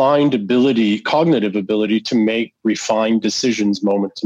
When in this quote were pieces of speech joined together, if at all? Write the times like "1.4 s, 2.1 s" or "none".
none